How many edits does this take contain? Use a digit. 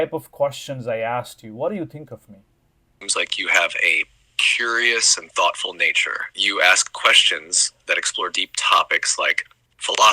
1